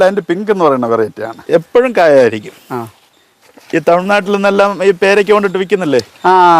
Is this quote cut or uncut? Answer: cut